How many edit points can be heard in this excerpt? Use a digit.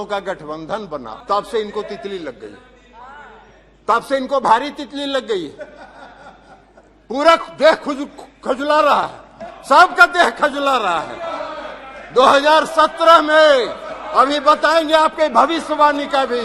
1